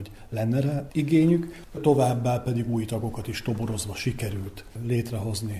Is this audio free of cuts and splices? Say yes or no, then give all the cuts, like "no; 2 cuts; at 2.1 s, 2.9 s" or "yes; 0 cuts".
no; 2 cuts; at 0.9 s, 1.8 s